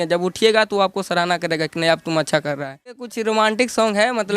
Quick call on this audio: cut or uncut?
cut